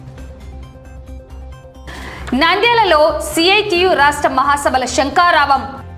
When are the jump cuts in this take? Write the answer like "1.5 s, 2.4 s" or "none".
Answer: 1.1 s